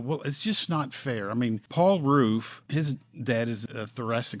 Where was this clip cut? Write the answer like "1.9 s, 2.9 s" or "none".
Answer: 1.6 s, 2.6 s, 3.6 s